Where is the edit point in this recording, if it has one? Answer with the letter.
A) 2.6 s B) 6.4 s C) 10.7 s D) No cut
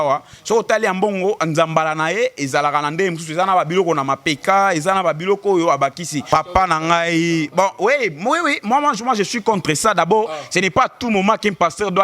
B